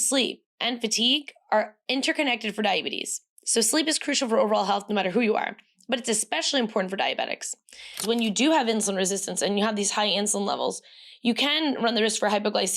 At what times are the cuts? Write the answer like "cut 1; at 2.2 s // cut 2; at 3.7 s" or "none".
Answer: cut 1; at 8.0 s